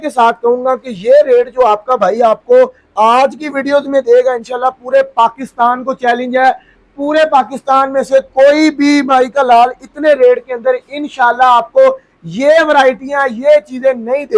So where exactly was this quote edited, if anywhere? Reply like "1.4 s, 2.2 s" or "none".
none